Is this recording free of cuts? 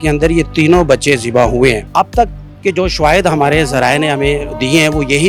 no; 1 cut; at 1.8 s

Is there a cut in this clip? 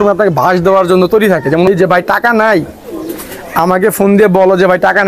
yes; 1 cut; at 1.7 s

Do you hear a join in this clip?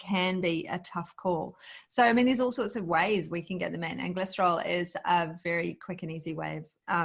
no; 0 cuts

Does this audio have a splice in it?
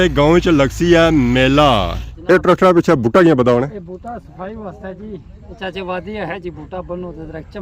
yes; 1 cut; at 1.9 s

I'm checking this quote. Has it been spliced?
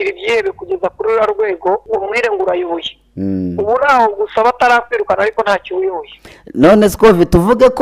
yes; 1 cut; at 1.8 s

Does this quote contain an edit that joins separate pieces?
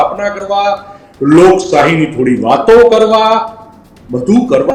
no; 0 cuts

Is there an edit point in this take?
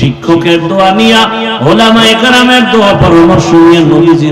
no; 0 cuts

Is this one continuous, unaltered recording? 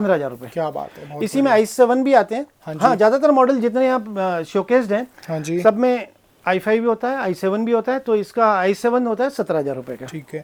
yes; 0 cuts

